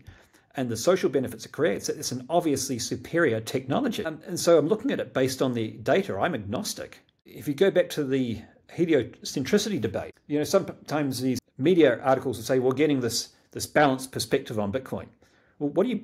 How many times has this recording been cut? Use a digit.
4